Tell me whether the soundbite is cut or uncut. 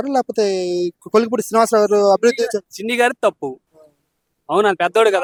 uncut